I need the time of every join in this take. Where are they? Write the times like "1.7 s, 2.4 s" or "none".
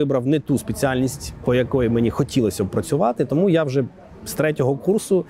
none